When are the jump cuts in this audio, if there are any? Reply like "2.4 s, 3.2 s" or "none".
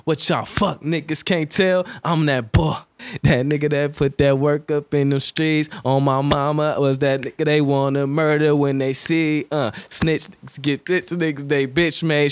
none